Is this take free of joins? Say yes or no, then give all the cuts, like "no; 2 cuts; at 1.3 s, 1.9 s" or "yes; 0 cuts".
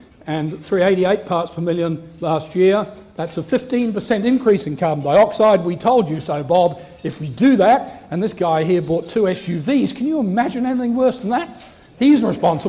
yes; 0 cuts